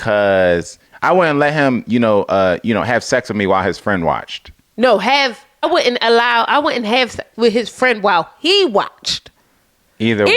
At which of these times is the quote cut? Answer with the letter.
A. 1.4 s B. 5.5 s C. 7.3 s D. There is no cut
B